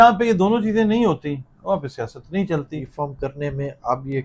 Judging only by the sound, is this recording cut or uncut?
cut